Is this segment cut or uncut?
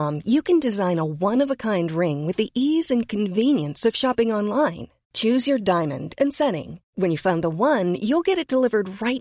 uncut